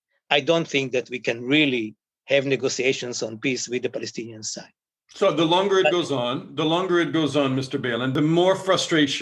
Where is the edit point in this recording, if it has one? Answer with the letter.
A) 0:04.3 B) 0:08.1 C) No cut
B